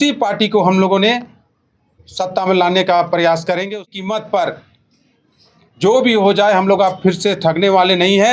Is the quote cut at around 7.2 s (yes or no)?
no